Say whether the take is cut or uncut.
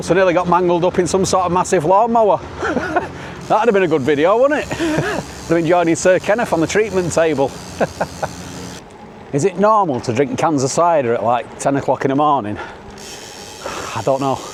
uncut